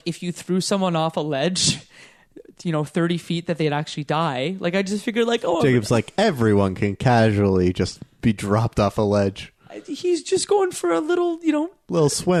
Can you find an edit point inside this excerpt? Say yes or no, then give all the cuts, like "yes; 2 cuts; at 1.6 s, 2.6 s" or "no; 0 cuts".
no; 0 cuts